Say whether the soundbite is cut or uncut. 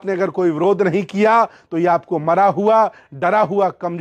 uncut